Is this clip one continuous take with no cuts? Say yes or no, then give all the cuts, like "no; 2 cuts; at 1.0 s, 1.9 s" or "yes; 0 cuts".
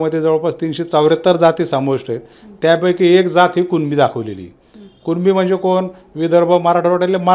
yes; 0 cuts